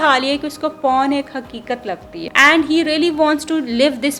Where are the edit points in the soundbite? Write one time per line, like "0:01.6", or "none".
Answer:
0:02.2

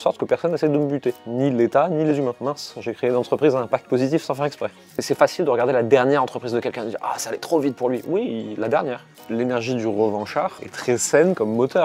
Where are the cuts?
0:02.4
0:04.9
0:09.1
0:10.7

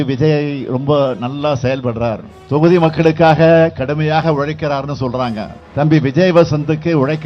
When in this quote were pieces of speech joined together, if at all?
0:05.5

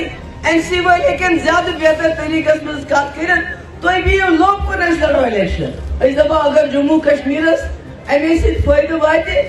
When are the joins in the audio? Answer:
0:05.8

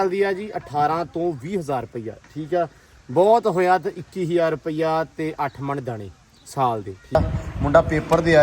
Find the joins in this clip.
0:07.1

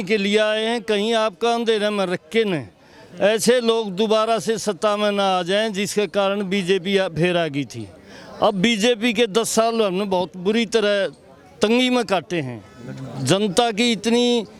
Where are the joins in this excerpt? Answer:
none

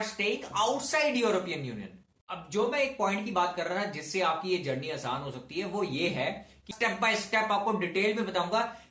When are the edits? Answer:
0:02.0
0:06.7

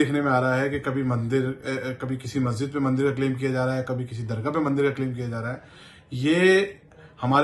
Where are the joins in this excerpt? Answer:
none

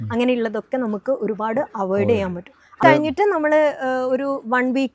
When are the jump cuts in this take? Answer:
0:02.8

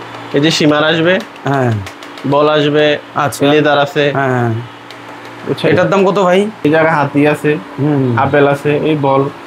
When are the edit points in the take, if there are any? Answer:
0:06.6

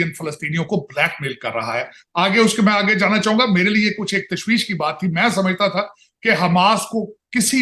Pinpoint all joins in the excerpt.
none

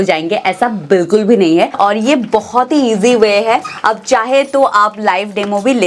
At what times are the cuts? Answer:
0:01.8

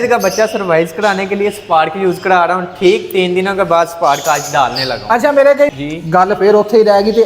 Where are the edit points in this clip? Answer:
0:05.7

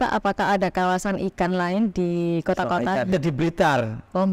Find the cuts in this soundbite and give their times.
0:03.1

